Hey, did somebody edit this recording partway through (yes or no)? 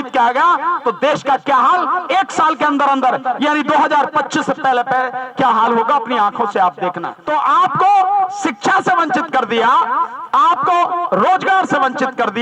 yes